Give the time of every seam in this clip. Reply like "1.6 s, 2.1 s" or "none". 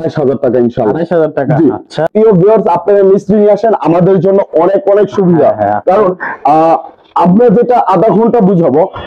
2.1 s